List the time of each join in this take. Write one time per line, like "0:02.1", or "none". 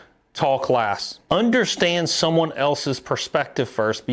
0:01.1